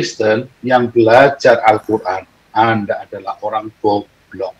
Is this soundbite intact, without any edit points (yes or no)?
yes